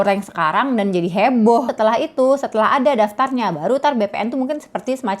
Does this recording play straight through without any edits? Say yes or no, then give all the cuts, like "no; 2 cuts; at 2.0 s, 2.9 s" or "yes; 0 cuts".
no; 1 cut; at 1.7 s